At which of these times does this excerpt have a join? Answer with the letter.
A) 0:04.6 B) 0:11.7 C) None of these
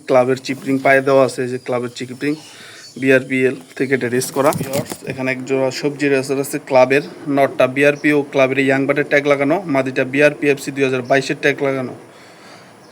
A